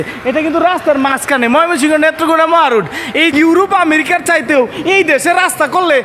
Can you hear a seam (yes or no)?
yes